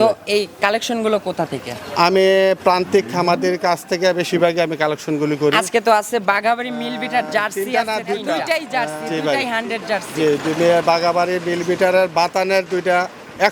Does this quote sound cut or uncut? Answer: cut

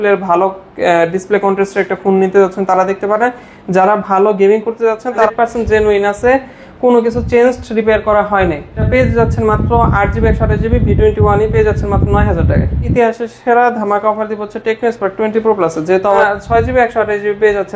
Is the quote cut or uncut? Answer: cut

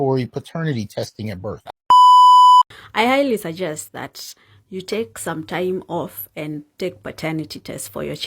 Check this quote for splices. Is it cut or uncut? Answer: cut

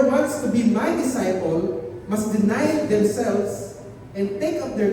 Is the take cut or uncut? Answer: cut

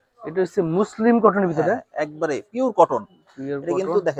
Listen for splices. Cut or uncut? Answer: uncut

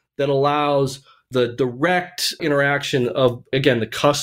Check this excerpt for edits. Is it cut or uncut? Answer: cut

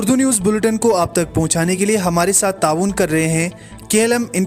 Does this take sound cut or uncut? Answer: uncut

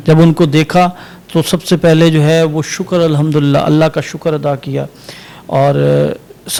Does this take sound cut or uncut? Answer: uncut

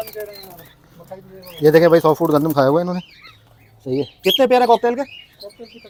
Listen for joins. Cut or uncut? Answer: uncut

